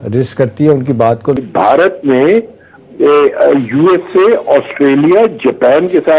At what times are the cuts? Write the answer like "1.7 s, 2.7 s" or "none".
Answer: 1.4 s